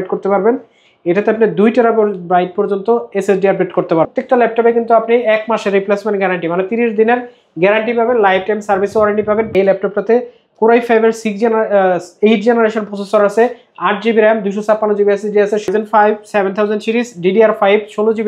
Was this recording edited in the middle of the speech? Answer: yes; 3 cuts; at 4.2 s, 9.5 s, 15.7 s

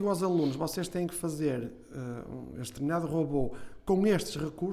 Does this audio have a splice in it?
no; 0 cuts

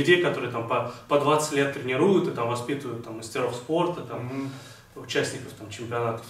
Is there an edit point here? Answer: no; 0 cuts

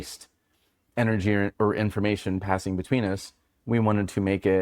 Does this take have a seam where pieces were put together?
yes; 1 cut; at 1.5 s

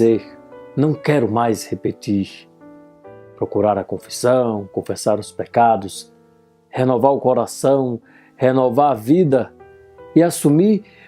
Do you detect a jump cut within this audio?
yes; 1 cut; at 5.1 s

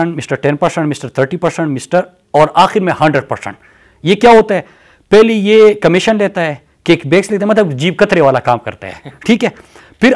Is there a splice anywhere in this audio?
no; 0 cuts

